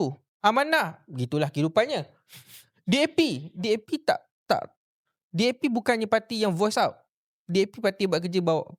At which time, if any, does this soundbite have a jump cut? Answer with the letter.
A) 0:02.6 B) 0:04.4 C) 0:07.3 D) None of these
D